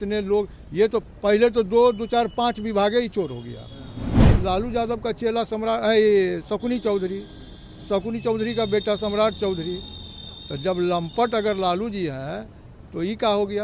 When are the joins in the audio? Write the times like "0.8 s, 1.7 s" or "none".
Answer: 4.2 s